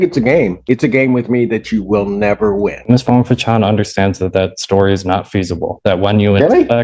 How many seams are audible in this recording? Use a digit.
1